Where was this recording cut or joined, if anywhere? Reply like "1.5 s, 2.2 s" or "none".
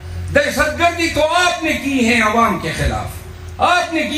none